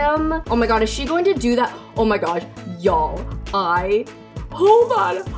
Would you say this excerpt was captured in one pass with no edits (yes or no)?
yes